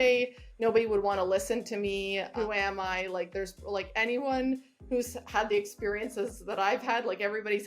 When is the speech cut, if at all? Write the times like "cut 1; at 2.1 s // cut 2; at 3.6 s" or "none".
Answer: cut 1; at 2.3 s